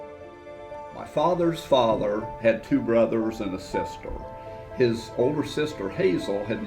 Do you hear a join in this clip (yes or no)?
yes